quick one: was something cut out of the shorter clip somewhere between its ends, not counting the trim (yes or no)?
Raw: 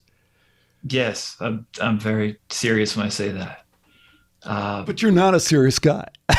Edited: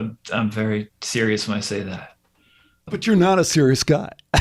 yes